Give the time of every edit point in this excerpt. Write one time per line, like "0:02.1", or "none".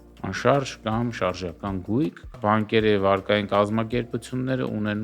0:02.3